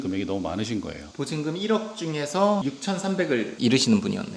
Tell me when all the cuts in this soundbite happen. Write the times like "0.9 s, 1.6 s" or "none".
1.0 s, 2.6 s